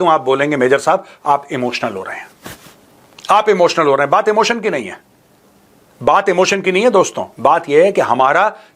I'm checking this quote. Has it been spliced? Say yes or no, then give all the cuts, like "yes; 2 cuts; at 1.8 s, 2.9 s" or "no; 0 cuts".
no; 0 cuts